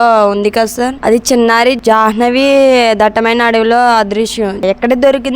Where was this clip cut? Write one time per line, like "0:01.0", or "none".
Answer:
0:01.0
0:01.8
0:04.6